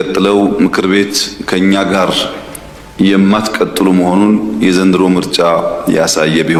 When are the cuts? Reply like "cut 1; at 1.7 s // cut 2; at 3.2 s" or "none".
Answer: none